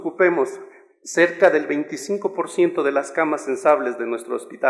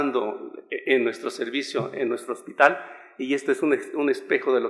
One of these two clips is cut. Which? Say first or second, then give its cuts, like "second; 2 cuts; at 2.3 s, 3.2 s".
second; 1 cut; at 2.8 s